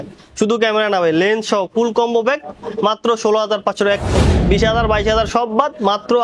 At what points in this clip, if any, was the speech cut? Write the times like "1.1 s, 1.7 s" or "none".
4.2 s